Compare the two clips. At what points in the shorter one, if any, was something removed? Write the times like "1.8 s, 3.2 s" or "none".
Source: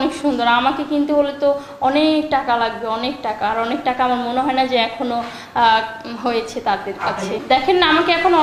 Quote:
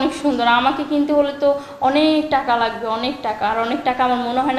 none

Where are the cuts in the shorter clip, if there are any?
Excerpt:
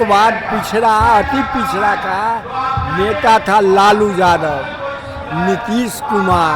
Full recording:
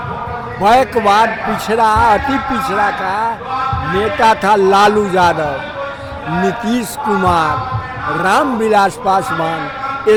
none

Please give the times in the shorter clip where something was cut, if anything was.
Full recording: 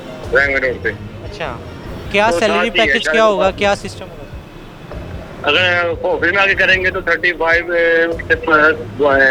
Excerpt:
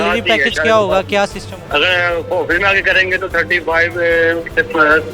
1.5 s

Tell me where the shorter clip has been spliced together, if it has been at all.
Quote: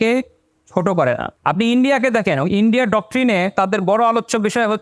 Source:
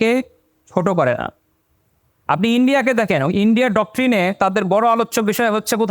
1.3 s

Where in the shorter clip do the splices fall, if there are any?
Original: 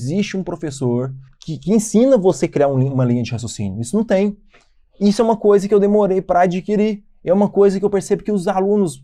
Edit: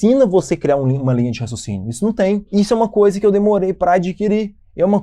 2.5 s

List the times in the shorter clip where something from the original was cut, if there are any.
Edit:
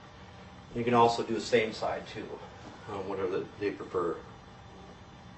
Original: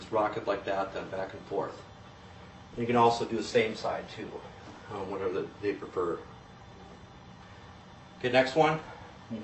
none

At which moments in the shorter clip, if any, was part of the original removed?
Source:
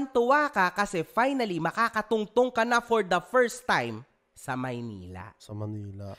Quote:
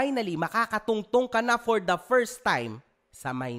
none

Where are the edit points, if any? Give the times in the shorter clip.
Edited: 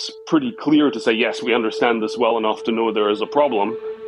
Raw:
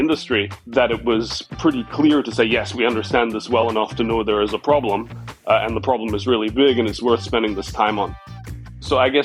none

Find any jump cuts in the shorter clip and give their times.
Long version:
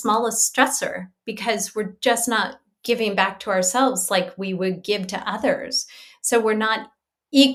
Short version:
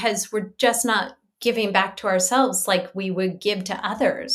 none

